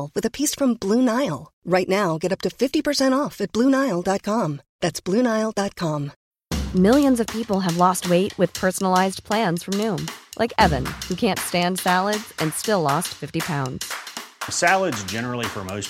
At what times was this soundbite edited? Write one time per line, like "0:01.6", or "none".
0:06.1